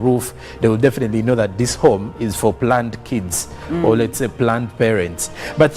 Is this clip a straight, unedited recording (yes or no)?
no